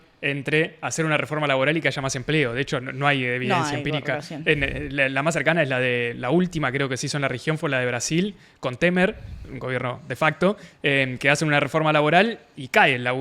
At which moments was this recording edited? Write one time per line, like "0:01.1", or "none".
none